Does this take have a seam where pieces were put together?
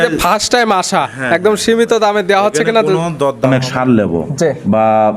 yes; 1 cut; at 3.5 s

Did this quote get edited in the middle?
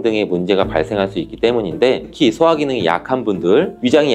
yes; 1 cut; at 2.1 s

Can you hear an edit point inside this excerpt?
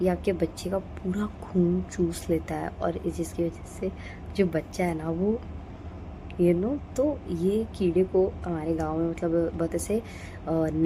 no; 0 cuts

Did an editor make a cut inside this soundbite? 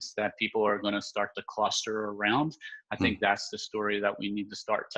no; 0 cuts

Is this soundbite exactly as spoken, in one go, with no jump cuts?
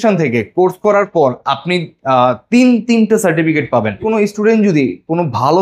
no; 1 cut; at 4.0 s

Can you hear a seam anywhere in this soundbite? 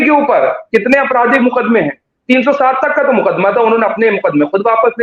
no; 0 cuts

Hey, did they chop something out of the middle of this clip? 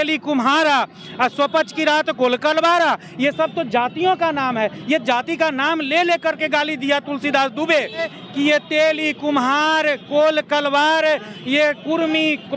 no; 0 cuts

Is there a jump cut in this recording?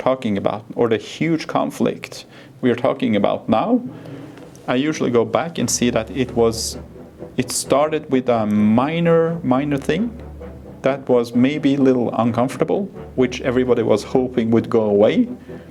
no; 0 cuts

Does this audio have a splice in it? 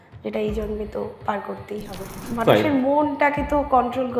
yes; 1 cut; at 2.2 s

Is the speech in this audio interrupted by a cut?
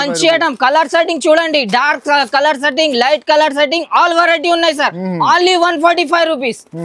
no; 0 cuts

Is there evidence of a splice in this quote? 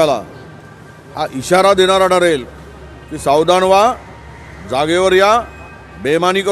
no; 0 cuts

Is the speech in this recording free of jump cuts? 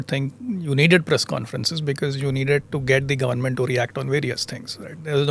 yes; 0 cuts

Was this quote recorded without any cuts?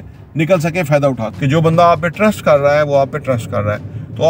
no; 1 cut; at 1.3 s

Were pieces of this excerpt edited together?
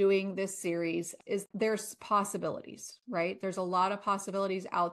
yes; 1 cut; at 1.1 s

